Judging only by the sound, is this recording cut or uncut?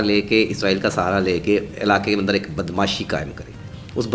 uncut